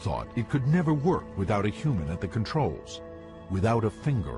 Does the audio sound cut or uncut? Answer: cut